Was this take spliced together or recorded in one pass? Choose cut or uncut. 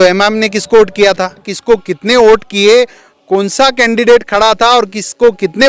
cut